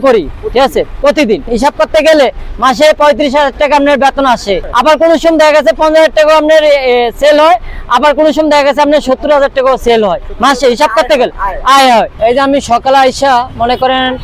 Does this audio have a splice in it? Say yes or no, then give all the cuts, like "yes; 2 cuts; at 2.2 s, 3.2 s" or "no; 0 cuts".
no; 0 cuts